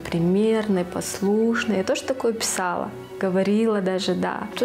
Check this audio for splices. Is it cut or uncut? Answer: uncut